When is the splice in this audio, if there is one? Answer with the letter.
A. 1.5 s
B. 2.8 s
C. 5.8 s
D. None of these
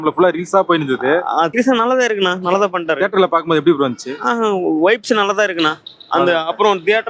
A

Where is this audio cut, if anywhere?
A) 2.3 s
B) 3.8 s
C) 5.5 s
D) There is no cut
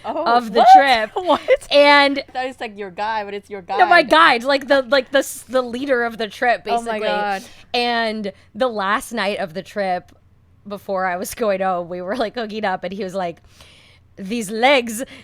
A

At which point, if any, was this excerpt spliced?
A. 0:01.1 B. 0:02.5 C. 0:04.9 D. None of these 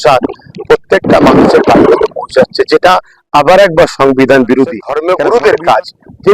C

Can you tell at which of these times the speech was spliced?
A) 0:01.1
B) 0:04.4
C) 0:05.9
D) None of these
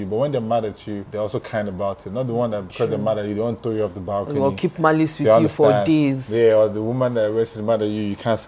A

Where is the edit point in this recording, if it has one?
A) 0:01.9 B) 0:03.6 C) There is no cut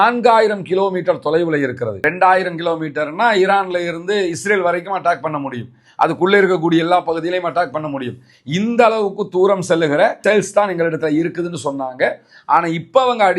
A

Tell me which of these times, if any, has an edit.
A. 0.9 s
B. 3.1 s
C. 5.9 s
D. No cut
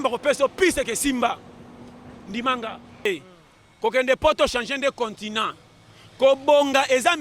B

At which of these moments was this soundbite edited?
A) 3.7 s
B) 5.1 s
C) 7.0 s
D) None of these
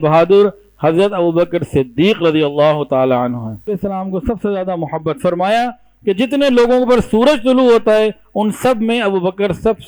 A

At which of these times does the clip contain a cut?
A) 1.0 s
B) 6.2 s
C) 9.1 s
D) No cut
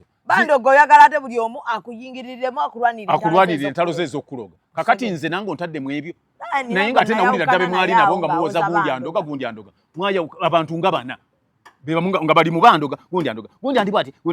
D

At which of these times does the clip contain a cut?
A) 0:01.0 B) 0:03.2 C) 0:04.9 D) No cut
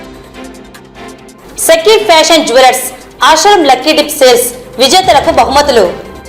A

